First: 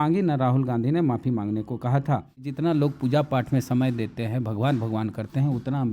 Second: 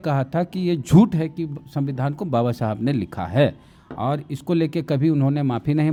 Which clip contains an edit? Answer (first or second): first